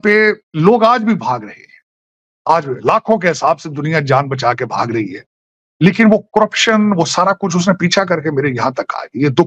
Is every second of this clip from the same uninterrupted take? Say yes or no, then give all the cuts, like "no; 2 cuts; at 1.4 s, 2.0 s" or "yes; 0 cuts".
yes; 0 cuts